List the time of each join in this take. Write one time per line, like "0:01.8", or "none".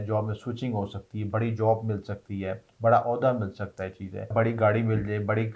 0:04.3